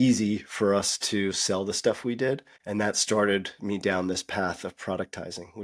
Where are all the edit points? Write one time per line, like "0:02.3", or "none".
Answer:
0:02.5

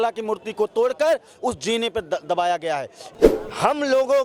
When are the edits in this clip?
0:03.0

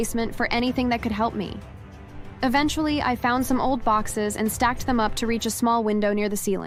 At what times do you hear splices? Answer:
none

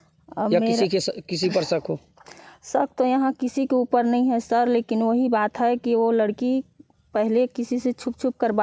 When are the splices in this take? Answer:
none

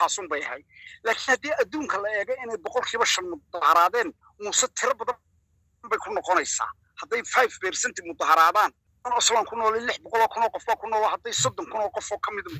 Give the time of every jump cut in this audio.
none

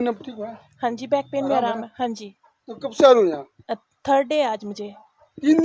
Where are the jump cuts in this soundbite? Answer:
none

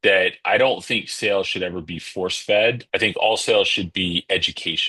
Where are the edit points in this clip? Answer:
0:02.8

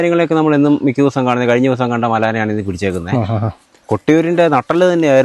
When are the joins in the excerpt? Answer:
0:03.7

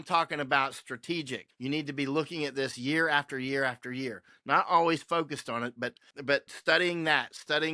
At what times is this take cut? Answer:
0:01.4
0:06.3

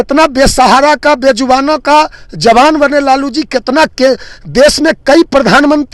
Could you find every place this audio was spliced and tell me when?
none

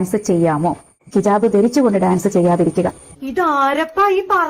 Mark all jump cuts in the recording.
0:00.9

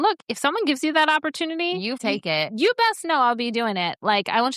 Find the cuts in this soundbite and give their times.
0:02.0

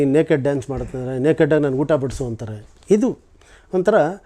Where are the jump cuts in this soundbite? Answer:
none

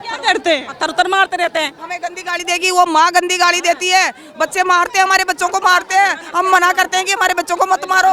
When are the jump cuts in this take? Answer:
0:01.8

